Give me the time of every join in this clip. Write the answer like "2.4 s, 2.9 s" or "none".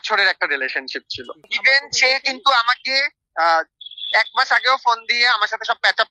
none